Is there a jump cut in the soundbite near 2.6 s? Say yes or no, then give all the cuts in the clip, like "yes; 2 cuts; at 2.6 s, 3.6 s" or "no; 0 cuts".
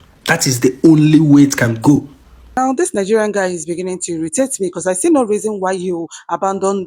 yes; 1 cut; at 2.6 s